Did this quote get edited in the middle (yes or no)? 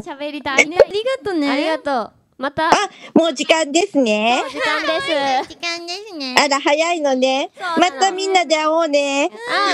yes